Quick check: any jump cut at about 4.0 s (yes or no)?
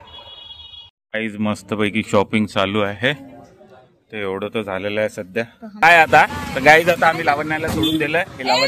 no